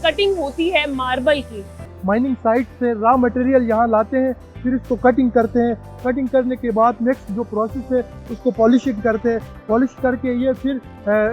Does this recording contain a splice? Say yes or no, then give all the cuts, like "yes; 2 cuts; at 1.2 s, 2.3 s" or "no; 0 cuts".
yes; 1 cut; at 1.8 s